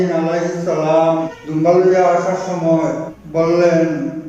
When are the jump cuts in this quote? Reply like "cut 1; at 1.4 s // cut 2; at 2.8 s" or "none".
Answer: cut 1; at 1.4 s // cut 2; at 3.1 s

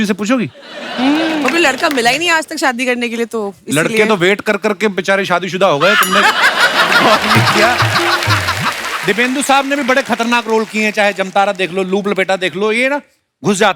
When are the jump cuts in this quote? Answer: cut 1; at 8.9 s

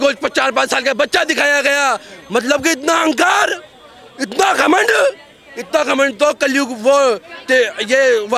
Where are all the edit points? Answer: none

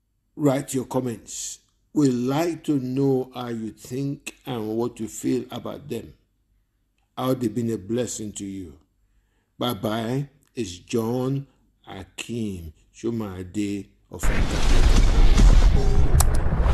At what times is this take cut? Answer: cut 1; at 14.0 s

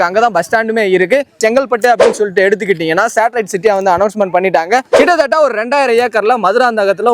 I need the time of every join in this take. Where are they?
cut 1; at 1.3 s // cut 2; at 4.9 s

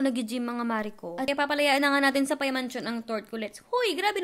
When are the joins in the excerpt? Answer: cut 1; at 1.3 s

